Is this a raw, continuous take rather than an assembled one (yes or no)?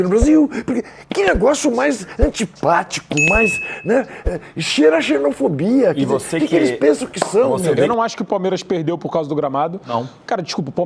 no